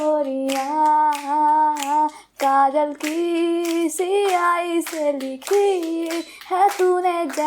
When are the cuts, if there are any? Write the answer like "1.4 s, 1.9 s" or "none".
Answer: none